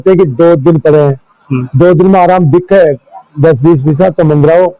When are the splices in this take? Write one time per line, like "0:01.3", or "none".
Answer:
none